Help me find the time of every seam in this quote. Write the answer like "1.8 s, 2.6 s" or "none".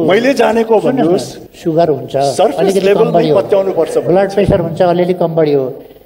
1.3 s